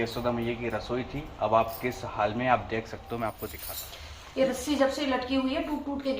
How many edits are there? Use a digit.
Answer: 1